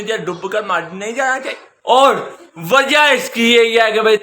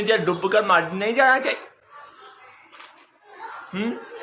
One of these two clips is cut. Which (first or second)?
first